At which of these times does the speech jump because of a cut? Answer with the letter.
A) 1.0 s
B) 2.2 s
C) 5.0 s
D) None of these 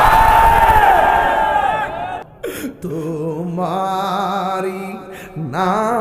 B